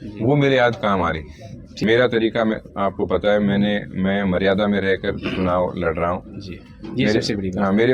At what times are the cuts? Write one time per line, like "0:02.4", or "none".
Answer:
0:01.7